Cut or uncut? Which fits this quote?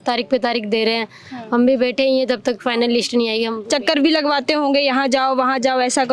uncut